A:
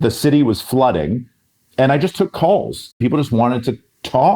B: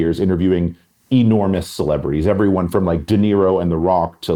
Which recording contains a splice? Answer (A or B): A